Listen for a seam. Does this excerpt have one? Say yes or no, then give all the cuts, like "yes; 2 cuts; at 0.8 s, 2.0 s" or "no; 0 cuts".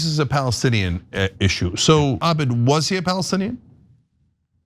yes; 1 cut; at 2.2 s